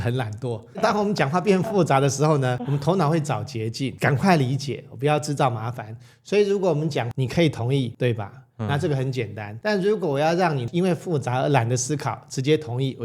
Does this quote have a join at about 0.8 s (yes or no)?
yes